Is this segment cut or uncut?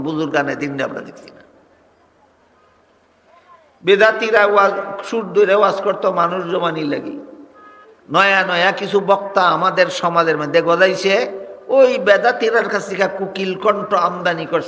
uncut